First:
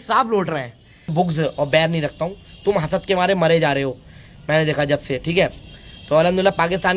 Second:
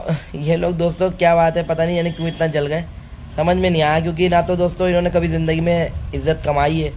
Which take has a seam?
first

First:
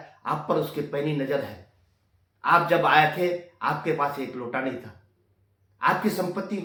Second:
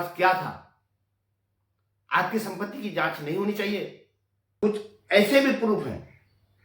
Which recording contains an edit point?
second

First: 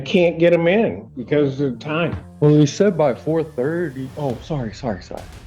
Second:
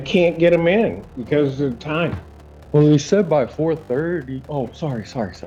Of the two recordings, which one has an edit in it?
first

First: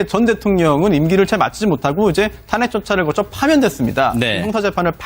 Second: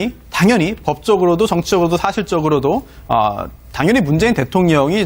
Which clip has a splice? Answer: second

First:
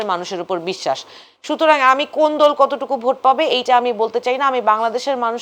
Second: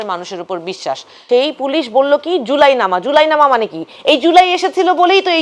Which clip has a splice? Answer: second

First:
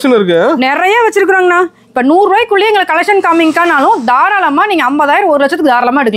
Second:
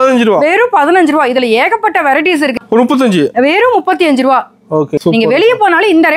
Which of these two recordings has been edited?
second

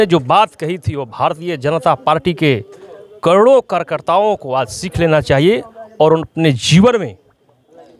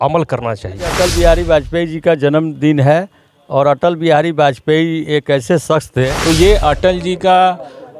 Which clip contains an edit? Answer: second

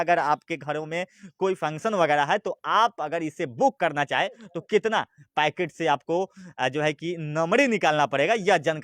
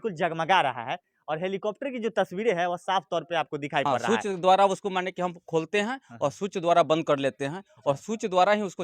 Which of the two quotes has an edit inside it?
second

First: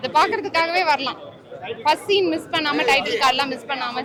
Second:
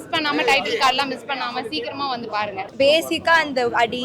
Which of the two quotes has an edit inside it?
second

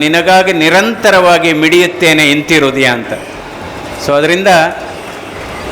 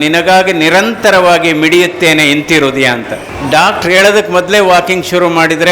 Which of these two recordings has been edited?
second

